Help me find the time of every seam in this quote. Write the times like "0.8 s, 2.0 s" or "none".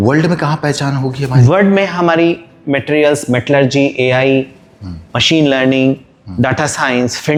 none